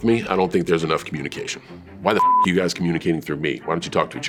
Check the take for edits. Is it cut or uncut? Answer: uncut